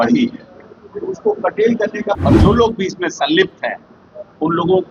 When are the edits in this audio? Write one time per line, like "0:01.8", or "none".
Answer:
0:02.2